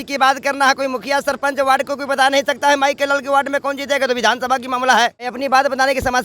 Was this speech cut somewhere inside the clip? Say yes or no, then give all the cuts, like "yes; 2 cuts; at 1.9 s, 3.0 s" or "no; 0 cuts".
yes; 1 cut; at 5.3 s